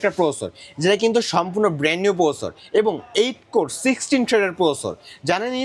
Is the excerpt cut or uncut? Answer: uncut